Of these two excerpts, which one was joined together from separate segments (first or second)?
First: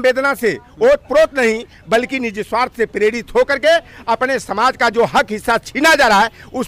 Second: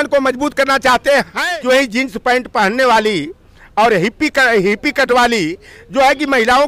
second